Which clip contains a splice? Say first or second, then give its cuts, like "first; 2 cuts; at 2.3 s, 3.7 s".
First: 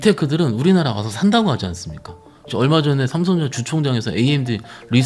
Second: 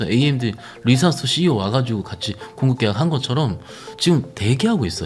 first; 1 cut; at 2.5 s